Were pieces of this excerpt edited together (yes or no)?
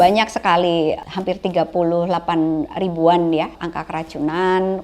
yes